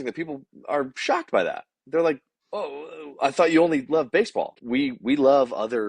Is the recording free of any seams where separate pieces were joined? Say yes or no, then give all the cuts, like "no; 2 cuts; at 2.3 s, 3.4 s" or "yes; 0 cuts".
no; 1 cut; at 4.6 s